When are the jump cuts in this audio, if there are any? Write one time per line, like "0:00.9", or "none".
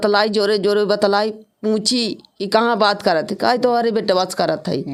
none